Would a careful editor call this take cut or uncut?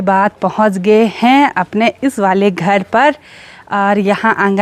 uncut